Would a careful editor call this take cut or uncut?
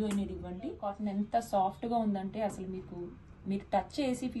cut